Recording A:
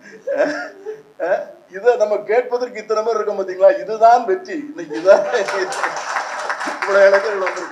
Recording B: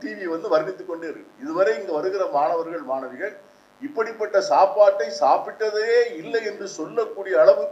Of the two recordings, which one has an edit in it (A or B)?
A